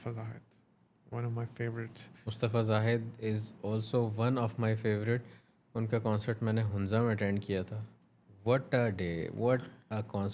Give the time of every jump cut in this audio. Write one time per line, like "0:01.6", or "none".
none